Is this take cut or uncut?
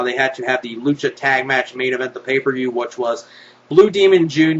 uncut